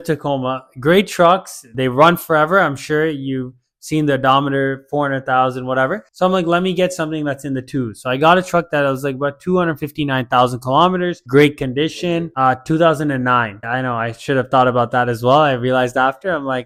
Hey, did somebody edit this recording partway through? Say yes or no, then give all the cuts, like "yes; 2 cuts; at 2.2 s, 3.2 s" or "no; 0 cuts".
no; 0 cuts